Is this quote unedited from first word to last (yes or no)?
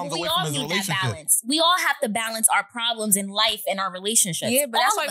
yes